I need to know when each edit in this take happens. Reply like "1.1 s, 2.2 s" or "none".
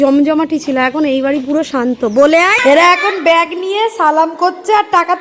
2.6 s